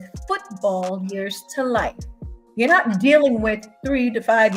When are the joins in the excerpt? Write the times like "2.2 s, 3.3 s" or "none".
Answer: none